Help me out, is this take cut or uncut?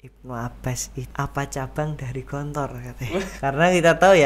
cut